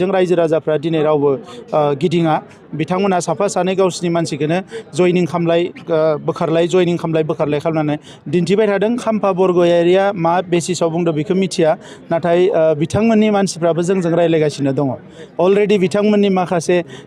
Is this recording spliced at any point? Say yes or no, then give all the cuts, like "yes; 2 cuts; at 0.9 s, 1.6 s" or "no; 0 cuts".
yes; 1 cut; at 9.0 s